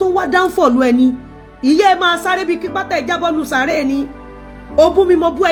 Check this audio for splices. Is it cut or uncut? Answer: uncut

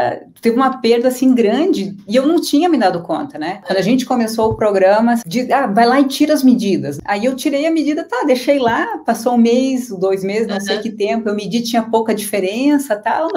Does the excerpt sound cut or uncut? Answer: cut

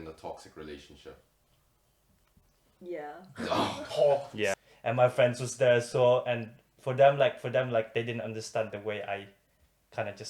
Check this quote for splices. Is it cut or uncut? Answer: cut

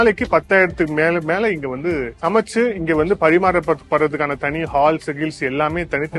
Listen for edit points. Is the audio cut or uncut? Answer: uncut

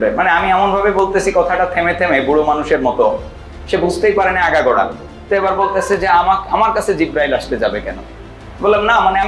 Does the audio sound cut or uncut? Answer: uncut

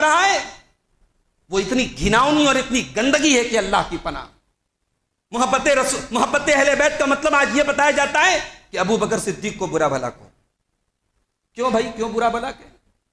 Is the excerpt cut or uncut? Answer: uncut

